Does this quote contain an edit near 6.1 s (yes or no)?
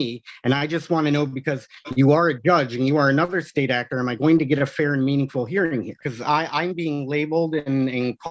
yes